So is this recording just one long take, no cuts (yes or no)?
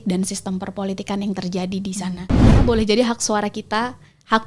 no